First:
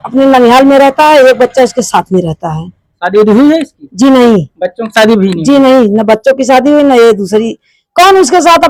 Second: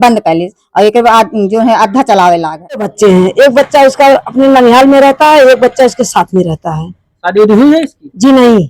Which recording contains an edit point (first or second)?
second